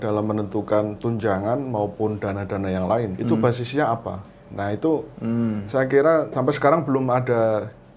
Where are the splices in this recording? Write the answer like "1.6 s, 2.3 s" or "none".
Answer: 3.1 s, 6.3 s